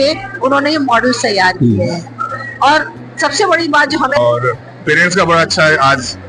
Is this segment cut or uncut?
cut